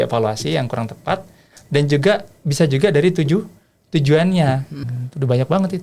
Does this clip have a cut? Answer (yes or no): yes